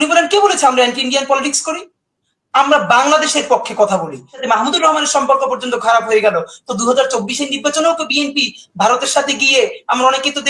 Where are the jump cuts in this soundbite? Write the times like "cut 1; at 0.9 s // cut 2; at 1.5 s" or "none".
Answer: cut 1; at 4.3 s